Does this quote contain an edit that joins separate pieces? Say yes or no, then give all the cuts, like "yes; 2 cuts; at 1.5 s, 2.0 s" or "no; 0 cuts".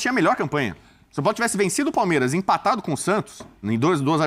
no; 0 cuts